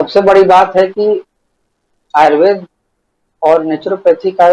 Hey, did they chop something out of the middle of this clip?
no; 0 cuts

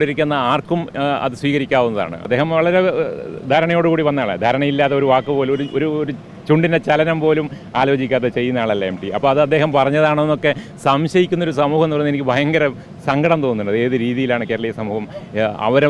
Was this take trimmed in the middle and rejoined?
yes; 1 cut; at 2.2 s

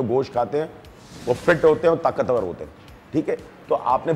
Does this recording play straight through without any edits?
yes; 0 cuts

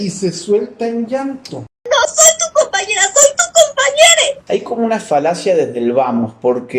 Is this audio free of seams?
no; 1 cut; at 4.4 s

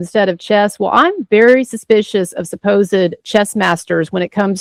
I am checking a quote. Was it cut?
no; 0 cuts

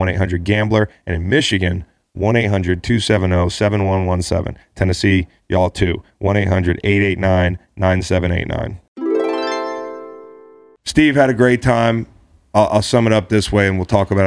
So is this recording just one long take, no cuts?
no; 1 cut; at 10.8 s

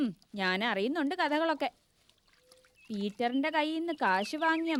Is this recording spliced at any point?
no; 0 cuts

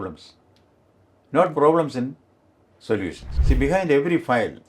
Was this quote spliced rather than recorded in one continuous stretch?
yes; 1 cut; at 3.3 s

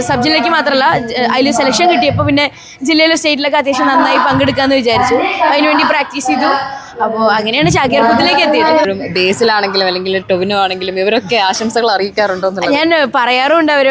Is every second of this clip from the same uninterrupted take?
no; 1 cut; at 8.9 s

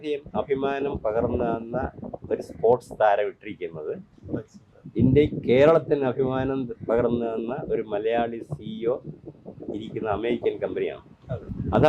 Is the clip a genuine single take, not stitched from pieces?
yes; 0 cuts

